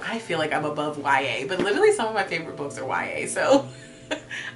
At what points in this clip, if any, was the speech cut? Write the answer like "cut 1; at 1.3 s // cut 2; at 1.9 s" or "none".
none